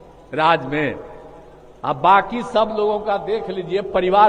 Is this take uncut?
yes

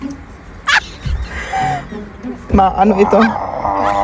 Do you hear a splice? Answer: no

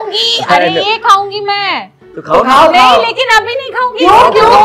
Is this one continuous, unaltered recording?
yes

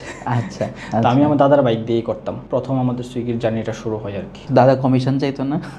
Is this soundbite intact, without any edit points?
no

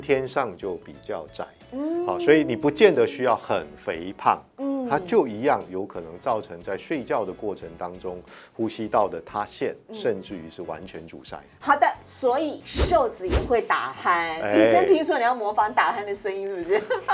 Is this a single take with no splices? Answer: yes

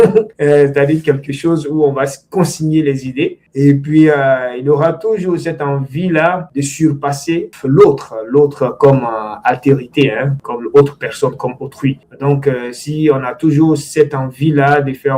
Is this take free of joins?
yes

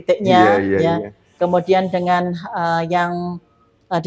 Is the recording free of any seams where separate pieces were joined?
yes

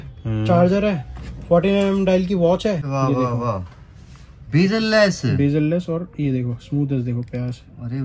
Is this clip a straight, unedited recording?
no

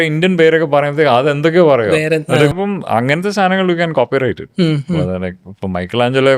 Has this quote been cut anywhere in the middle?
yes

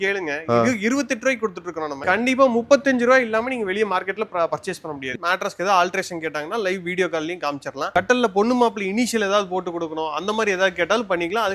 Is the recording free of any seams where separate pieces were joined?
no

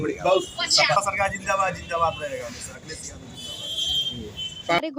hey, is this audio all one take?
no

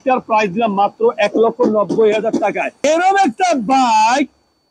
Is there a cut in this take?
yes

